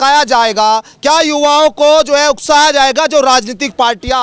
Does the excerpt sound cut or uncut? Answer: uncut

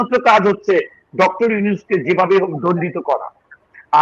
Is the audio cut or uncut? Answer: uncut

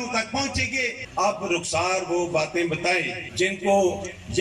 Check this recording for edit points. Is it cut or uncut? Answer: cut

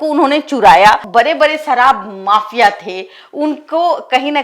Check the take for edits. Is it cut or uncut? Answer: cut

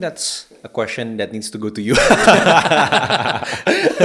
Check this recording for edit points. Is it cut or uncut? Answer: uncut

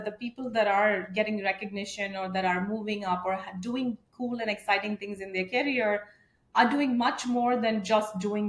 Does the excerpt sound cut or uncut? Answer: uncut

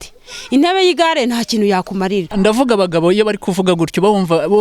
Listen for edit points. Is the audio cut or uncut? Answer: cut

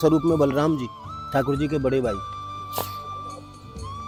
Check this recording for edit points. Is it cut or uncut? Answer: uncut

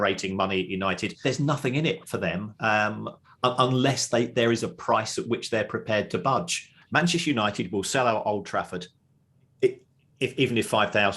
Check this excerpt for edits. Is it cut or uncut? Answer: cut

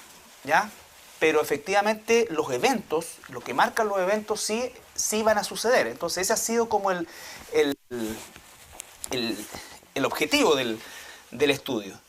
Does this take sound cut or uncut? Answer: cut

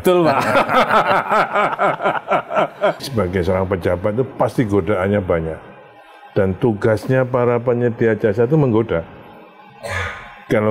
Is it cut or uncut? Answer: cut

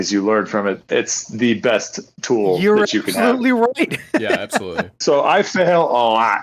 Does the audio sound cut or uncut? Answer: uncut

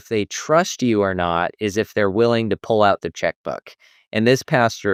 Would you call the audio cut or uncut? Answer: uncut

